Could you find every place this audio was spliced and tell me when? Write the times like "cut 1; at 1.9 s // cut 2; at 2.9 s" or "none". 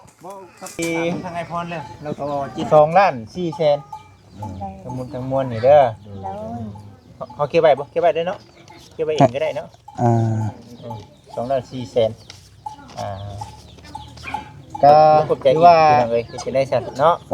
cut 1; at 2.7 s // cut 2; at 16.0 s